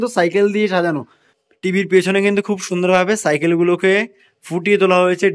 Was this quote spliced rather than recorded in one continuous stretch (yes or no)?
yes